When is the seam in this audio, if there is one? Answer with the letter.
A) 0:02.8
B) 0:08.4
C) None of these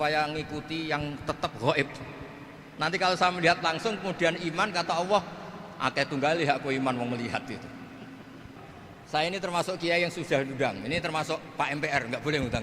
B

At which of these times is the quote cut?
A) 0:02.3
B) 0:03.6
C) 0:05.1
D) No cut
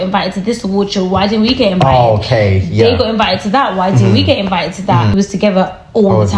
C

